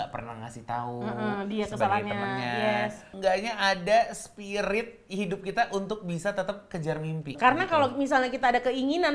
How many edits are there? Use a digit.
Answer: 2